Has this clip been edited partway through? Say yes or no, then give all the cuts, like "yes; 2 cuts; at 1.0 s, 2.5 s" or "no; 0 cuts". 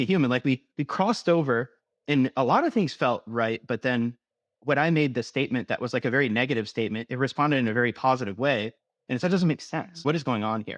no; 0 cuts